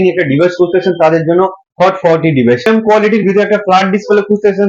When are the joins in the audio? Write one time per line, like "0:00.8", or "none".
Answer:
0:02.7